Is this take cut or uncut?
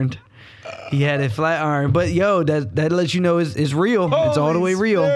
uncut